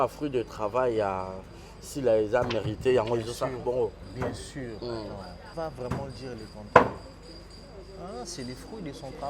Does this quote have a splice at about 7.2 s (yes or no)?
no